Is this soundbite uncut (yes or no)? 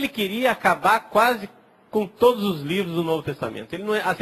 yes